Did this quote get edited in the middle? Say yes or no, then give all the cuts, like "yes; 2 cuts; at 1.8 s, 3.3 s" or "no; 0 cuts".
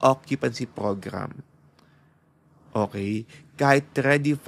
no; 0 cuts